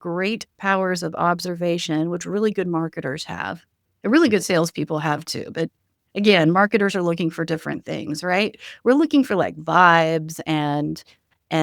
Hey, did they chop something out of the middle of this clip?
no; 0 cuts

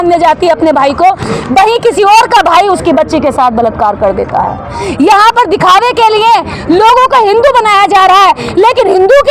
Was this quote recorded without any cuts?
yes; 0 cuts

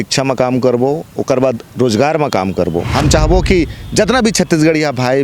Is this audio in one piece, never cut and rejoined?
no; 1 cut; at 2.9 s

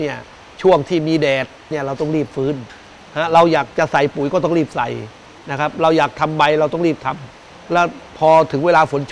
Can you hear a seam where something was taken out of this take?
yes; 1 cut; at 1.7 s

